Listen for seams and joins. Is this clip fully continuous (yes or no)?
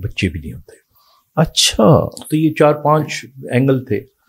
yes